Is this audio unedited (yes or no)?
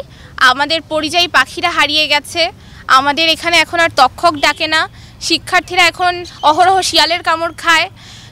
yes